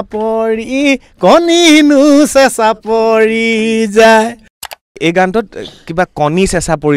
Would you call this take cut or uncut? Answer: cut